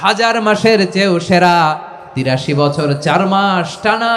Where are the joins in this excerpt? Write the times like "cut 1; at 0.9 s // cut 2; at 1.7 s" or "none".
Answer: cut 1; at 2.3 s